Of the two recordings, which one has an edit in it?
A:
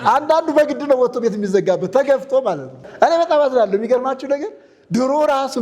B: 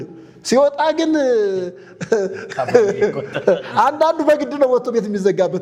A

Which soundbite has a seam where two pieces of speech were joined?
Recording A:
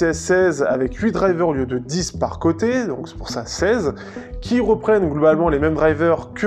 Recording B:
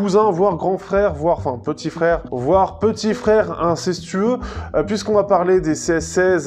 B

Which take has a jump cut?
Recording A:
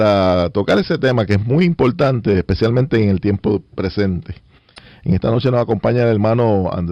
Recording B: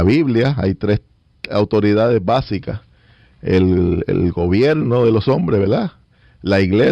B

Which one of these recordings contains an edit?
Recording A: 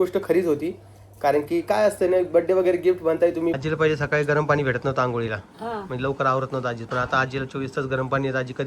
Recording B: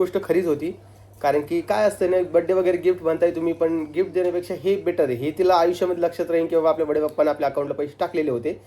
A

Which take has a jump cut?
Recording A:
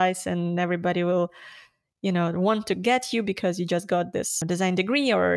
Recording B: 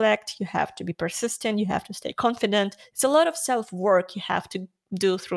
A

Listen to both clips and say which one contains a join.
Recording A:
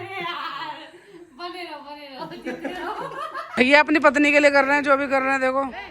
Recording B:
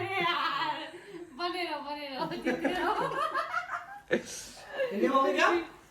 A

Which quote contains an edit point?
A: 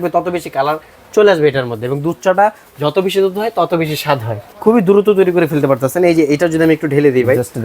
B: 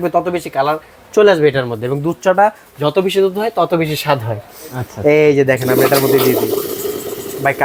A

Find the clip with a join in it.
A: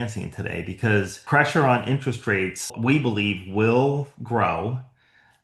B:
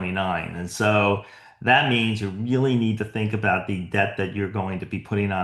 A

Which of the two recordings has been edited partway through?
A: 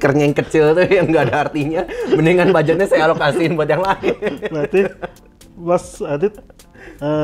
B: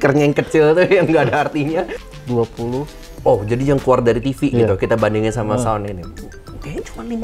B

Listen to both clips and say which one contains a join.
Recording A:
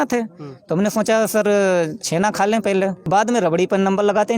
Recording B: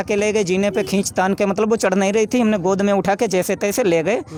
A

